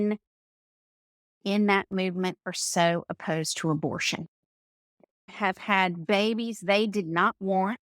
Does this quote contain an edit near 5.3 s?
yes; 1 cut; at 5.3 s

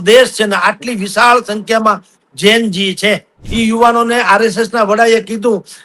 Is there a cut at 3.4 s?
yes; 1 cut; at 3.4 s

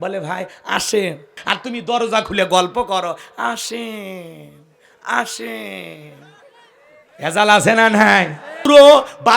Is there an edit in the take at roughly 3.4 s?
no; 2 cuts; at 1.4 s, 8.7 s

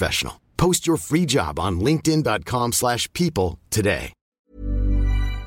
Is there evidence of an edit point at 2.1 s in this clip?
no; 1 cut; at 4.3 s

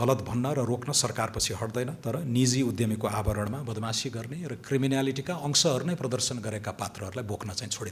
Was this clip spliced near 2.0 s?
yes; 1 cut; at 2.0 s

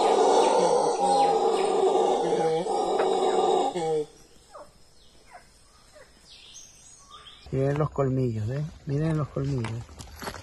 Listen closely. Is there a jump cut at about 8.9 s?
no; 1 cut; at 7.3 s

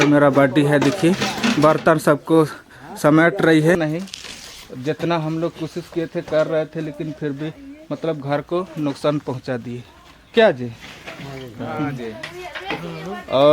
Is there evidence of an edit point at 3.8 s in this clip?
yes; 1 cut; at 3.8 s

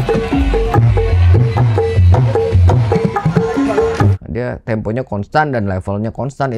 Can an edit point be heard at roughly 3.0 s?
yes; 3 cuts; at 1.6 s, 3.0 s, 4.2 s

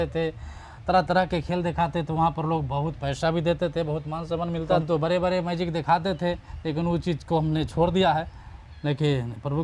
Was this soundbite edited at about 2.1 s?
no; 1 cut; at 4.8 s

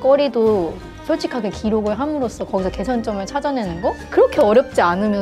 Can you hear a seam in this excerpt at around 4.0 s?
yes; 1 cut; at 4.0 s

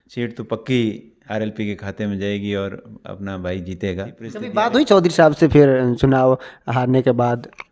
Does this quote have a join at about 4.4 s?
yes; 1 cut; at 4.4 s

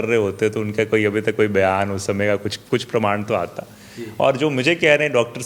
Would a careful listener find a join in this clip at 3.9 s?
no; 0 cuts

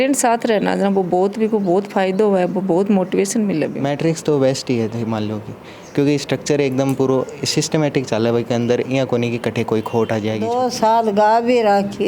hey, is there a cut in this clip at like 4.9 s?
no; 2 cuts; at 3.7 s, 10.5 s

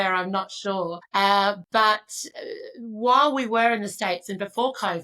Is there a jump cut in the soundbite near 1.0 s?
yes; 1 cut; at 1.0 s

